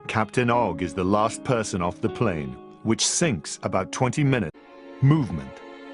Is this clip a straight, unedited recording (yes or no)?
yes